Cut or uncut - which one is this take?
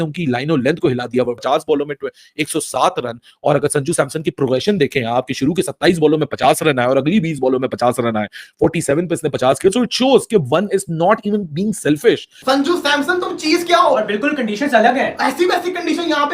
cut